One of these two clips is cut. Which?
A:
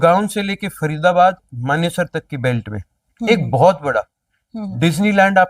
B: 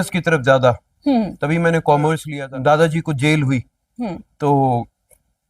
B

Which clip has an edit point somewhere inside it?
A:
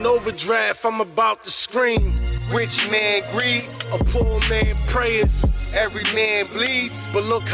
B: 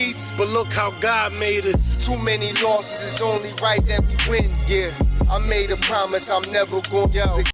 B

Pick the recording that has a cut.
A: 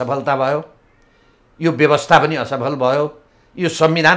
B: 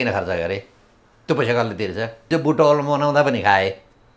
B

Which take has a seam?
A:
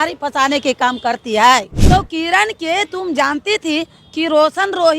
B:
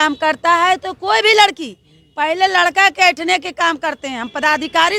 A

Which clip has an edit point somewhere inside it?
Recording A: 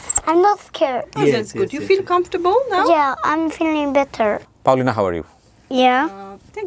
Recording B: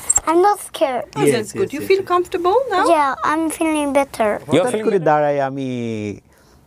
B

